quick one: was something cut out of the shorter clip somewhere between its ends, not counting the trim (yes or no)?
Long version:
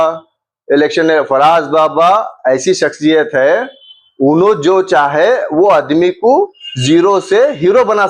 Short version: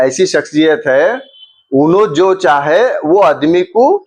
no